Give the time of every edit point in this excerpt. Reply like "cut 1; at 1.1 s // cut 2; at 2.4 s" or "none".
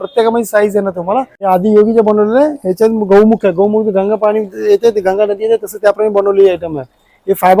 cut 1; at 1.3 s